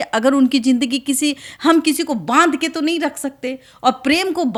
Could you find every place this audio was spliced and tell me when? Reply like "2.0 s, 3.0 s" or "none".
none